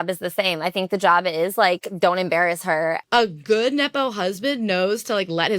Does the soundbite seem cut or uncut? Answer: cut